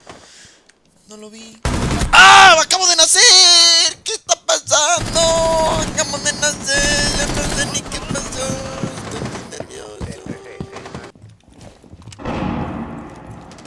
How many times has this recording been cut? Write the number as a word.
one